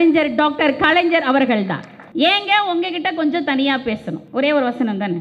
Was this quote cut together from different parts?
yes; 2 cuts; at 1.9 s, 4.2 s

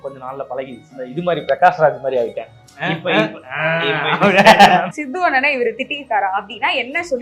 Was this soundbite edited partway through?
yes; 2 cuts; at 1.0 s, 4.9 s

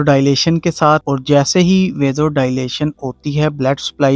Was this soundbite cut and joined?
no; 0 cuts

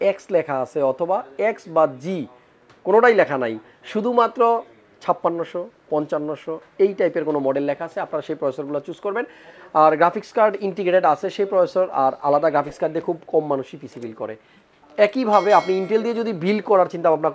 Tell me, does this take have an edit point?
no; 0 cuts

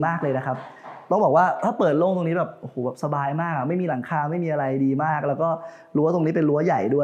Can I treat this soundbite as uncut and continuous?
yes; 0 cuts

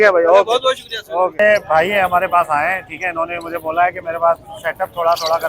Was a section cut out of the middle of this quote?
yes; 1 cut; at 1.4 s

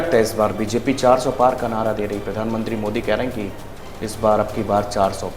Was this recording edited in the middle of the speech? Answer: no; 0 cuts

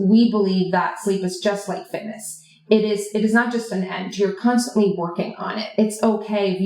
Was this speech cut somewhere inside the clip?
no; 0 cuts

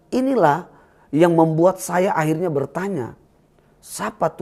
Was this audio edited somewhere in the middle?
no; 0 cuts

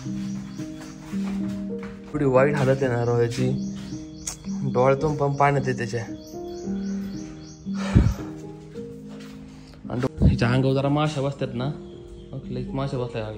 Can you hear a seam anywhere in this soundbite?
yes; 2 cuts; at 1.1 s, 10.1 s

